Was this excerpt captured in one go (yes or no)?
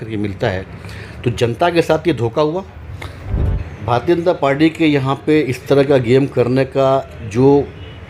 no